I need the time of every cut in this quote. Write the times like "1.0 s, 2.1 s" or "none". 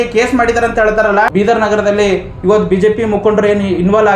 1.3 s